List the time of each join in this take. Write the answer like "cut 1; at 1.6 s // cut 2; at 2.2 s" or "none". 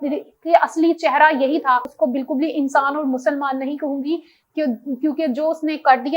cut 1; at 1.9 s

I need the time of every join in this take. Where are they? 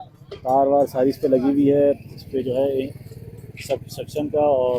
none

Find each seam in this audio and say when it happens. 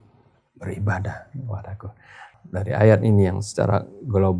cut 1; at 2.2 s

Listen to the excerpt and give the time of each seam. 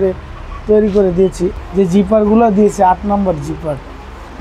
cut 1; at 1.5 s

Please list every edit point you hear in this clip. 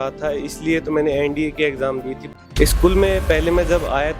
cut 1; at 2.2 s

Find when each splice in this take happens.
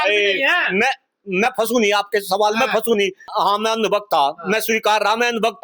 cut 1; at 3.3 s

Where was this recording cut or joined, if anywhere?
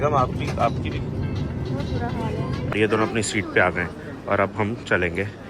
cut 1; at 2.7 s

